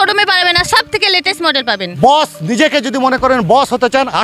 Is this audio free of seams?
no; 1 cut; at 2.0 s

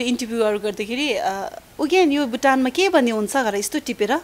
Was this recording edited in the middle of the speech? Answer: yes; 1 cut; at 1.6 s

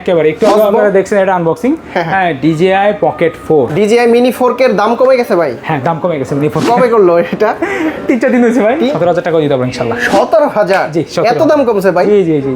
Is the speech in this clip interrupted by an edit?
yes; 2 cuts; at 3.7 s, 8.9 s

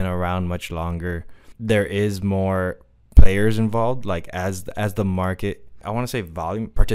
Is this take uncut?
no; 2 cuts; at 1.4 s, 5.8 s

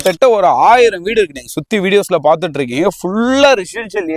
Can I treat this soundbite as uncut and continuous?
yes; 0 cuts

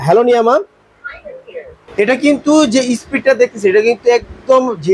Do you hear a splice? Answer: yes; 1 cut; at 1.8 s

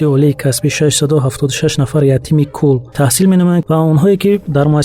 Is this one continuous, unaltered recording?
no; 2 cuts; at 2.9 s, 3.6 s

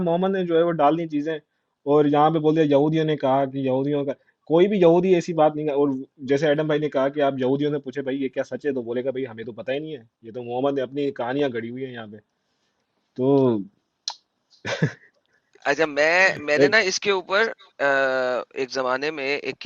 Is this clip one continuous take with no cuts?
yes; 0 cuts

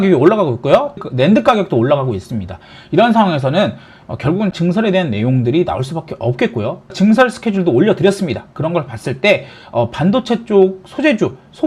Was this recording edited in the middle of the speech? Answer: yes; 3 cuts; at 1.0 s, 4.6 s, 6.9 s

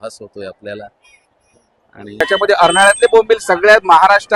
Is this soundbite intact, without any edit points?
no; 1 cut; at 2.2 s

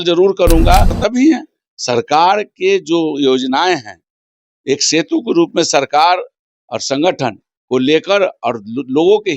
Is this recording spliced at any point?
yes; 1 cut; at 1.0 s

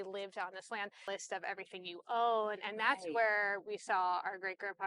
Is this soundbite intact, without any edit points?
no; 1 cut; at 1.1 s

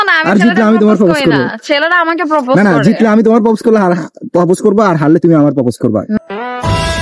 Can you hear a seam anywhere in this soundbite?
no; 0 cuts

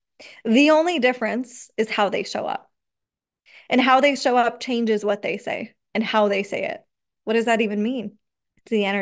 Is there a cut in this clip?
yes; 1 cut; at 7.1 s

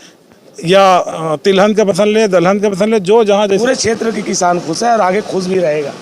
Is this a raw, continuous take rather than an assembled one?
no; 1 cut; at 3.6 s

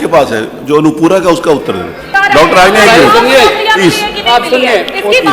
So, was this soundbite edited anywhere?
yes; 1 cut; at 2.0 s

